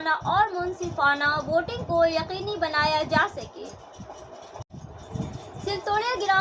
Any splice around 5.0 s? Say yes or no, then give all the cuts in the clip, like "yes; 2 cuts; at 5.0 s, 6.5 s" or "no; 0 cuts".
yes; 1 cut; at 5.0 s